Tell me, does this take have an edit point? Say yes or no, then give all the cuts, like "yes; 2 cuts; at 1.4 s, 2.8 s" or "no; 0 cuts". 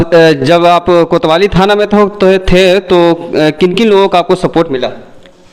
no; 0 cuts